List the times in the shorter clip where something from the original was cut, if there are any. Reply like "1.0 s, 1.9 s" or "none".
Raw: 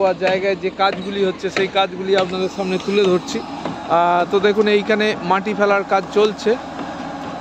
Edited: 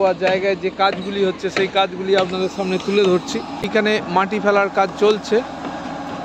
3.7 s

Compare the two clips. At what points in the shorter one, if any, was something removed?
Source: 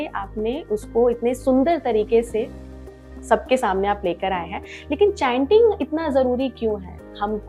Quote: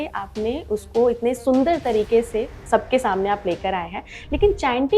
2.6 s

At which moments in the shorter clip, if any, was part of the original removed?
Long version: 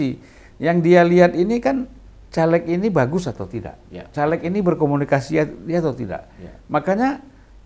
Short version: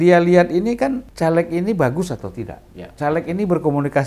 1.1 s

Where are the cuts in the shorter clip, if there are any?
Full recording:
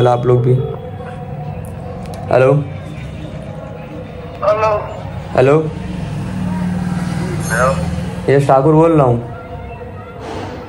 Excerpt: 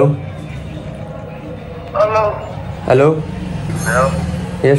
3.7 s

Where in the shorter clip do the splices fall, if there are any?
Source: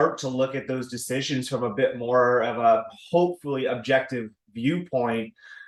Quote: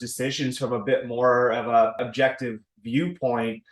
2.1 s

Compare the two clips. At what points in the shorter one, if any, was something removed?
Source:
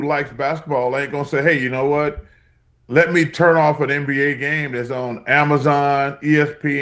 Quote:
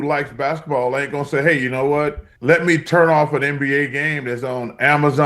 2.3 s

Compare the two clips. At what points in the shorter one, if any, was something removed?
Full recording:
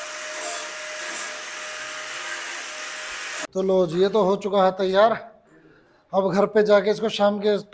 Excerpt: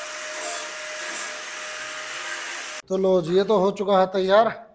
2.8 s

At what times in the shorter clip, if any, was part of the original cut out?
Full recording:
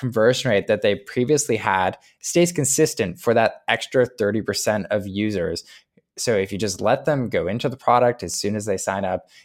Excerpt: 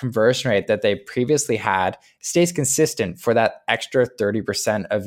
none

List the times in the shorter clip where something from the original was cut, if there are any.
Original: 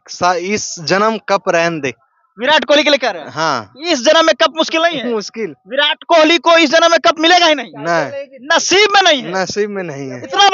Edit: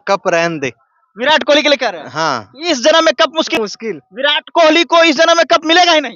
3.5 s

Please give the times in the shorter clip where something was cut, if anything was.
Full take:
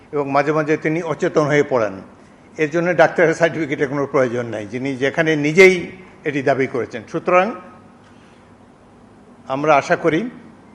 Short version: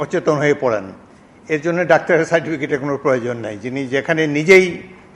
none

